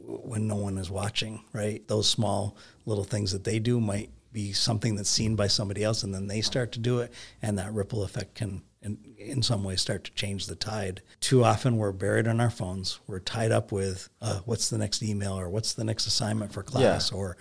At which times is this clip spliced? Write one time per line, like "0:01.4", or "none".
0:01.8
0:11.1